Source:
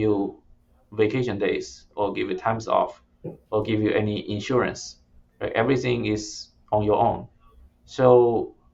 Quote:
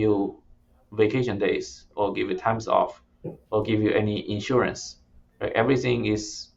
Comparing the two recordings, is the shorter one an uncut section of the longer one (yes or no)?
yes